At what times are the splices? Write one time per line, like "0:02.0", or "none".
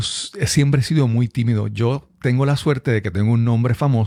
none